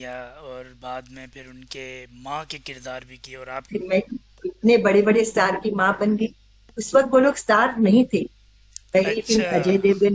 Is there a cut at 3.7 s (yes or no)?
yes